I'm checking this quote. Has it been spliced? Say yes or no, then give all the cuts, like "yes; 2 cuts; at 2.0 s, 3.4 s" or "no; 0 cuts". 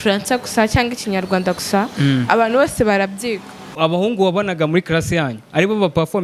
yes; 1 cut; at 3.6 s